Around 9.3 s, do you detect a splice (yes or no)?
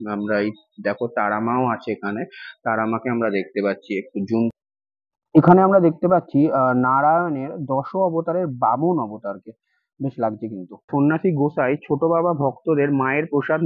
no